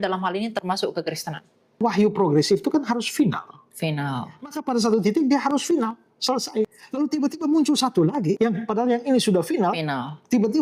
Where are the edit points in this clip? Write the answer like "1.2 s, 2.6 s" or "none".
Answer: 1.8 s, 6.8 s, 8.4 s